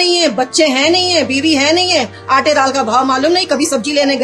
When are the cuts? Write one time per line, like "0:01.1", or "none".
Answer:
none